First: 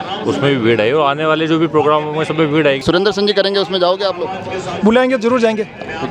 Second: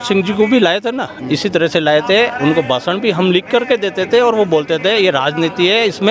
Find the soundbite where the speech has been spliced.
first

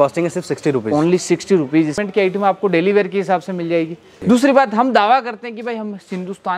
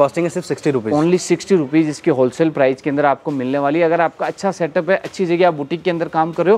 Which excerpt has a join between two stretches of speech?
first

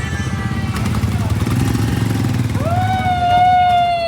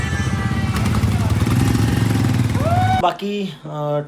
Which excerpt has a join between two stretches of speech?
second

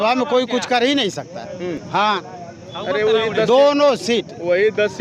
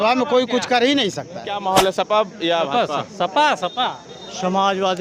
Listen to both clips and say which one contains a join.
second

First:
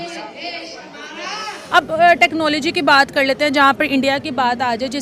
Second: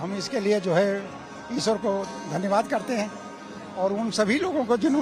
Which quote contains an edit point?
first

